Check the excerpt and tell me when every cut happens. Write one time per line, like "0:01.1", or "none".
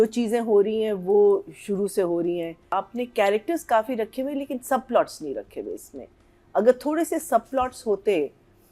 0:02.6

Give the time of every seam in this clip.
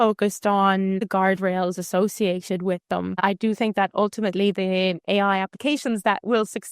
0:01.0
0:03.1

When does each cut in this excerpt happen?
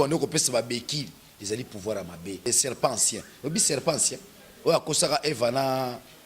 0:02.4

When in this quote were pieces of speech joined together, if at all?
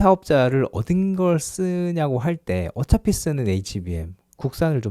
none

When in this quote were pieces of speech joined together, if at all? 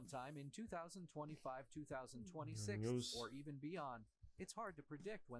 0:03.9

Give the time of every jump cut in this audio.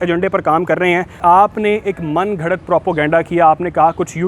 0:01.1

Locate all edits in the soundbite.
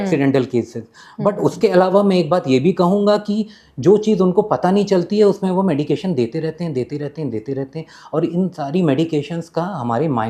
none

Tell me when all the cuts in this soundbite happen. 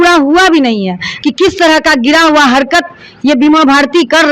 0:01.1

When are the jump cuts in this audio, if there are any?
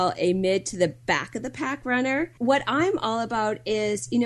0:02.3

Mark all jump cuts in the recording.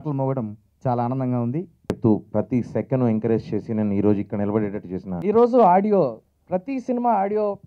0:01.9
0:05.1

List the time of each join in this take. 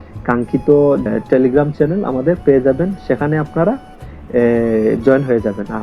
0:01.1

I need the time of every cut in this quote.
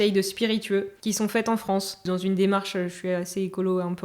0:00.9
0:02.0

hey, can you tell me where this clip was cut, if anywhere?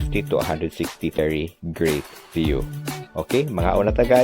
0:01.2

